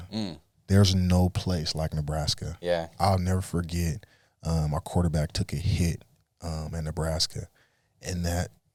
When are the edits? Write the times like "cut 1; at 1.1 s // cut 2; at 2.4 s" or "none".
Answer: none